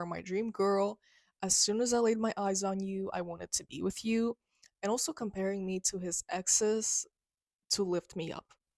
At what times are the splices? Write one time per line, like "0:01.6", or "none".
none